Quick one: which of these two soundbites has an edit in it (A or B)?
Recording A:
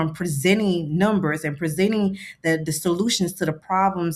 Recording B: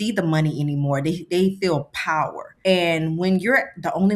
B